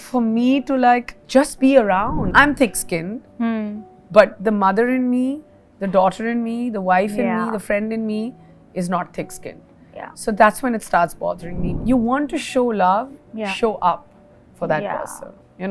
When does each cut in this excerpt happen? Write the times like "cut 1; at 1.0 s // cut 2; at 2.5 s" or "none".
cut 1; at 2.2 s // cut 2; at 11.7 s